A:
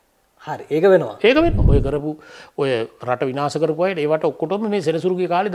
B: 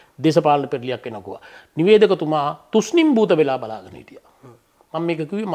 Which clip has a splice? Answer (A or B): A